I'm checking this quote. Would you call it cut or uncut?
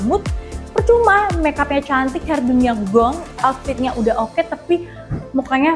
cut